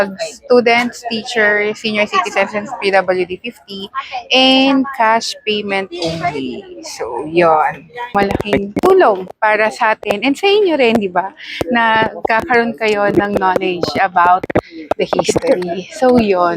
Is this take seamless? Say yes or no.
no